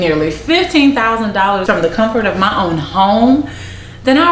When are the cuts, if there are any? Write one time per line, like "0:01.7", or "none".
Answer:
0:01.6